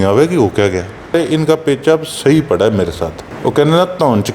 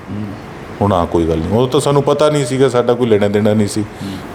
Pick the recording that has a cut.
first; 2 cuts; at 1.1 s, 3.2 s

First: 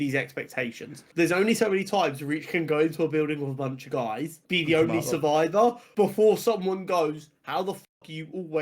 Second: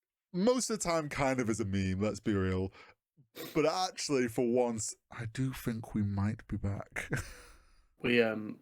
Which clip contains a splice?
first; 3 cuts; at 1.0 s, 4.4 s, 5.8 s

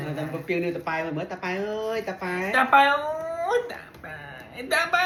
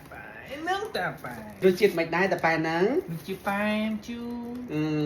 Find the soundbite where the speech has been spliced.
second; 1 cut; at 1.6 s

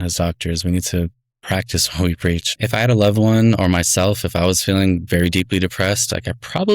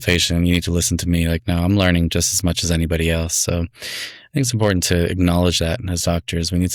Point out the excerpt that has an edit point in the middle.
first; 1 cut; at 2.5 s

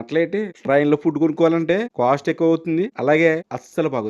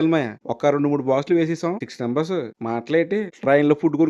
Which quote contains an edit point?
second; 1 cut; at 1.8 s

